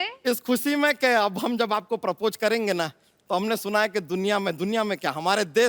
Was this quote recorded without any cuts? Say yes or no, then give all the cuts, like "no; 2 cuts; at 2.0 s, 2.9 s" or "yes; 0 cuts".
yes; 0 cuts